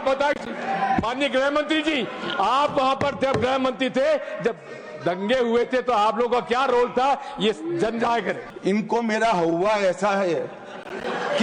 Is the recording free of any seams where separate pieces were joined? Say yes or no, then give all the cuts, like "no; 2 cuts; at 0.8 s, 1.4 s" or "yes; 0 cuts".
no; 1 cut; at 8.4 s